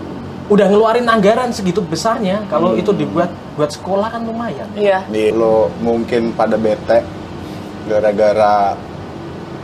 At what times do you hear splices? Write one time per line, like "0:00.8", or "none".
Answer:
0:05.3